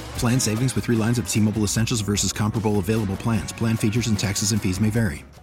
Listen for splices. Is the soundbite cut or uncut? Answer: uncut